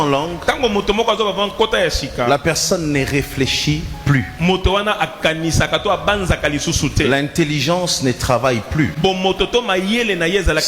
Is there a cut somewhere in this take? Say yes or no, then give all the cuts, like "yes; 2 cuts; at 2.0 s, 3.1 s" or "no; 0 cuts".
no; 0 cuts